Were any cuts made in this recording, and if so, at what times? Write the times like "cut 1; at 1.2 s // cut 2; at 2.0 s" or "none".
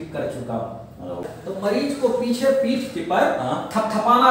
cut 1; at 1.2 s